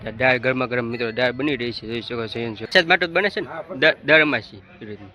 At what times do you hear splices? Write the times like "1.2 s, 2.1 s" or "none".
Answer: 2.7 s